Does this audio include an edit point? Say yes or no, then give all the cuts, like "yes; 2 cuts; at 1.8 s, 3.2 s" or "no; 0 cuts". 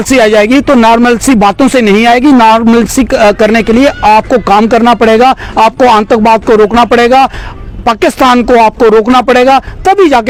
no; 0 cuts